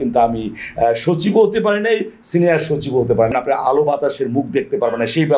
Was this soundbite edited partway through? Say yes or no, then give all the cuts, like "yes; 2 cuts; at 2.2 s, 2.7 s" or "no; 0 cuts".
yes; 1 cut; at 3.3 s